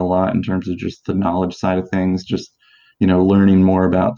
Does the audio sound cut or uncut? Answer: uncut